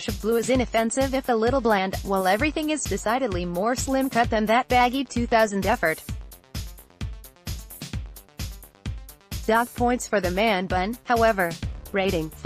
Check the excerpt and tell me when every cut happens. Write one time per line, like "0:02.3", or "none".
0:06.3
0:09.2